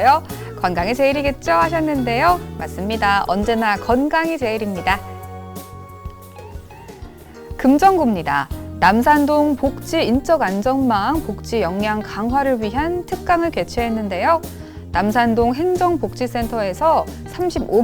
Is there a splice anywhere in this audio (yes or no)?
no